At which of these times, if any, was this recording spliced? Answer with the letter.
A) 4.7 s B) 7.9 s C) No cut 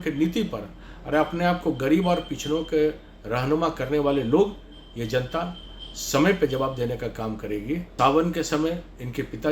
B